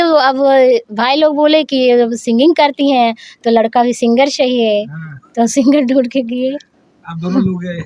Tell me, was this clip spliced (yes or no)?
no